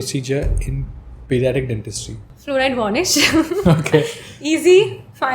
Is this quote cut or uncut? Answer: cut